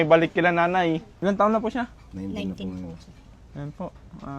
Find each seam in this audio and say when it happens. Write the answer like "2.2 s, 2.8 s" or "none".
1.1 s